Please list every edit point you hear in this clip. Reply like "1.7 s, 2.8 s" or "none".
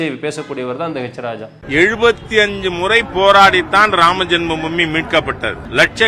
1.6 s